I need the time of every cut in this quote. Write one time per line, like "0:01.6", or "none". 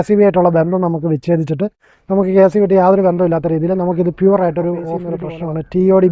0:05.0